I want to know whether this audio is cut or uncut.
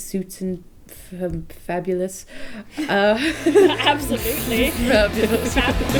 uncut